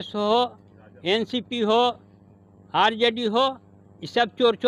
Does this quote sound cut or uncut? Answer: uncut